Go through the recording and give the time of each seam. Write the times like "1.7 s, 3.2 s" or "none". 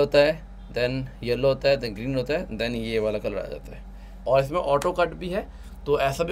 4.1 s